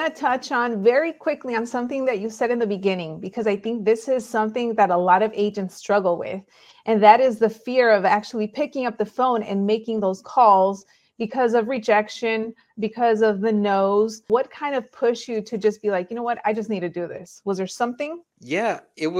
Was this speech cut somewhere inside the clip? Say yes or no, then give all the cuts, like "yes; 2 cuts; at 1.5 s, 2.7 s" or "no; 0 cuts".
yes; 2 cuts; at 14.2 s, 18.3 s